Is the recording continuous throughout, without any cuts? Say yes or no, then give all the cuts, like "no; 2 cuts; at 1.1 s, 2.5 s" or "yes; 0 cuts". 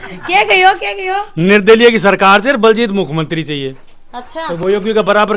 yes; 0 cuts